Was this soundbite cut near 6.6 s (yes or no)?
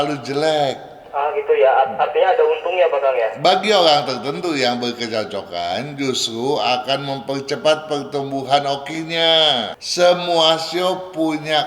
no